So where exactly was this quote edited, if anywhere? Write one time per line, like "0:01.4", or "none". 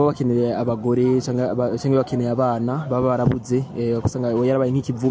none